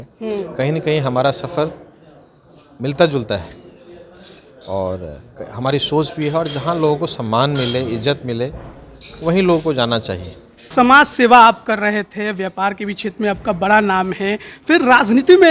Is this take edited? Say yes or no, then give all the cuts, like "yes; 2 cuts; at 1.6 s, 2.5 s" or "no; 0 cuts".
yes; 1 cut; at 10.6 s